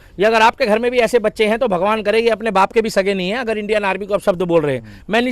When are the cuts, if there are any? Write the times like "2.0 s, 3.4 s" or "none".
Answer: none

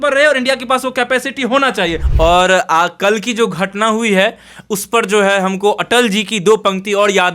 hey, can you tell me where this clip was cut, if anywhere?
2.0 s

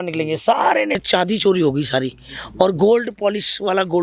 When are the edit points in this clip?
1.0 s

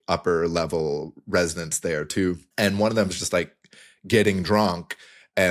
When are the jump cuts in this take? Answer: 2.5 s

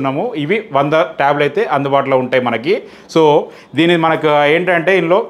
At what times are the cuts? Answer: none

